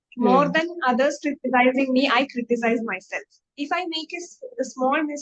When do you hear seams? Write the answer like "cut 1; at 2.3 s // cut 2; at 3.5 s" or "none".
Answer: cut 1; at 3.4 s